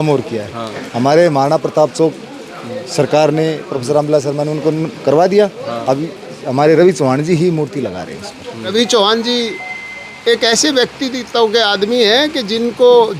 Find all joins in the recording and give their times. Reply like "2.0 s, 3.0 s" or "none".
8.7 s